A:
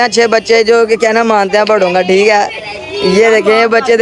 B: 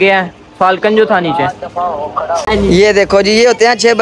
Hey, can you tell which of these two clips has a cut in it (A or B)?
B